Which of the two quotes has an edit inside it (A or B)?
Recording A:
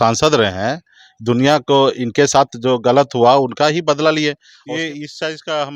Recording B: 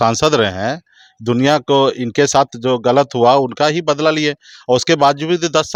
A